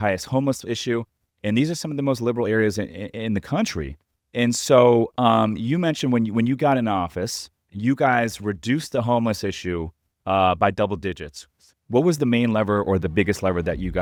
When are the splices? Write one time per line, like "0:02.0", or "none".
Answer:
none